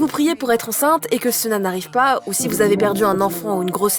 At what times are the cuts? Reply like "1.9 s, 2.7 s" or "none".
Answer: none